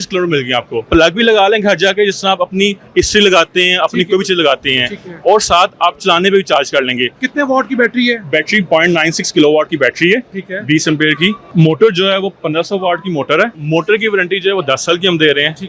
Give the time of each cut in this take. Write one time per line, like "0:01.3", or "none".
0:00.9
0:07.2
0:11.4
0:13.6